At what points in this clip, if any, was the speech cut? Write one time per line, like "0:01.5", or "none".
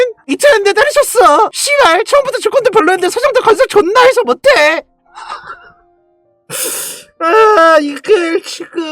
0:01.6